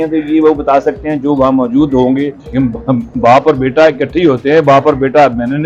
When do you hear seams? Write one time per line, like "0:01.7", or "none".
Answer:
0:02.4